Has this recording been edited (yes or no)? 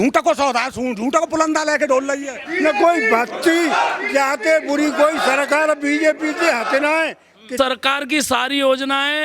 yes